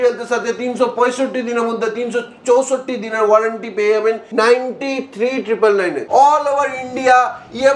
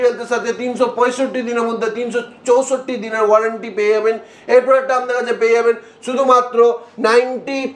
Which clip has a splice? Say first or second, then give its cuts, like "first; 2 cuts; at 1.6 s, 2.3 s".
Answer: first; 2 cuts; at 4.2 s, 6.0 s